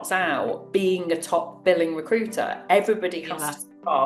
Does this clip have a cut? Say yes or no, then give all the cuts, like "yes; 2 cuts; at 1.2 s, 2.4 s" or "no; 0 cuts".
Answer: no; 0 cuts